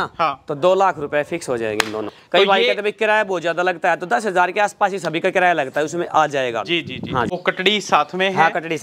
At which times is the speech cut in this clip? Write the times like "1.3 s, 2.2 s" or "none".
2.1 s, 7.4 s